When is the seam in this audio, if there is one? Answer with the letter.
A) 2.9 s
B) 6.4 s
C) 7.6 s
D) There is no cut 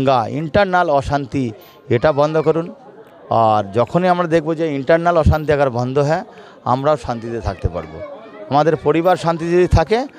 D